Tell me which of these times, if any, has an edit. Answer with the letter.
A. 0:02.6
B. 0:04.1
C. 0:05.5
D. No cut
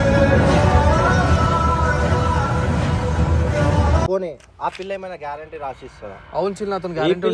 D